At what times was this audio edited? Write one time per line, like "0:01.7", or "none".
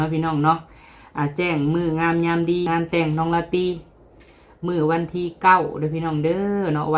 0:02.7